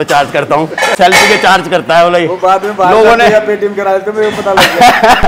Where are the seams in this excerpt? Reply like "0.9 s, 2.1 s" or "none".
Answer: 0.9 s